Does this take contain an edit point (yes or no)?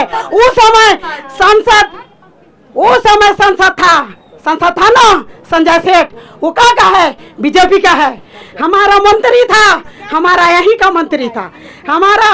no